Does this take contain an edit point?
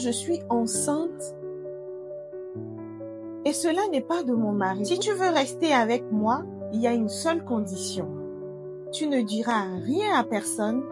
yes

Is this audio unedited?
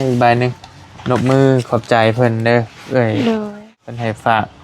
no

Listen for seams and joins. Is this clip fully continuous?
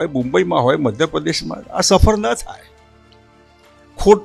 yes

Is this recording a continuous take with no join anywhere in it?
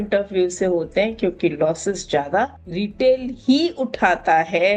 yes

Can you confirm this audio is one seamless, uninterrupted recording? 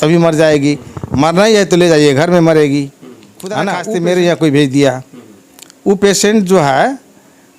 no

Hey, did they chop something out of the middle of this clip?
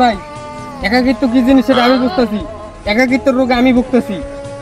no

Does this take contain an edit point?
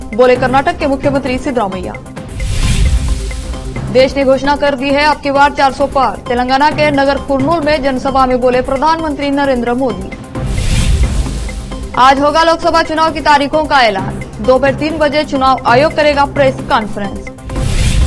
no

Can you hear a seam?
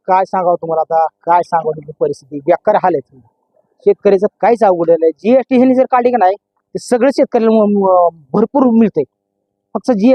no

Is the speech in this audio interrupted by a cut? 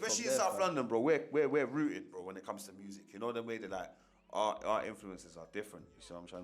no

